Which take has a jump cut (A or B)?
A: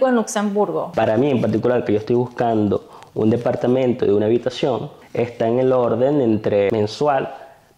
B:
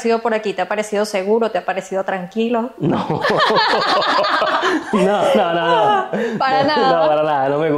A